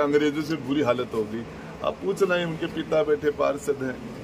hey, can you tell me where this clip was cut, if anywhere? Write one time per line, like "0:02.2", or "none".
none